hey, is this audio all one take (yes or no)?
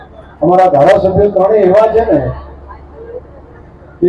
yes